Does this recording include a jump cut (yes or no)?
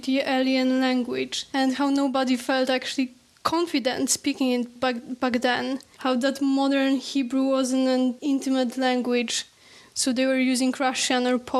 yes